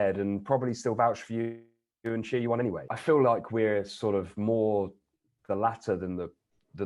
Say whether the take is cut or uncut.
cut